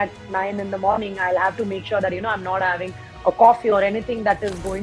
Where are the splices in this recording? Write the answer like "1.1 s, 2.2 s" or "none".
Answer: none